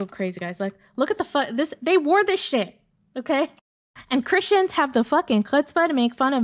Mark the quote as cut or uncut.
uncut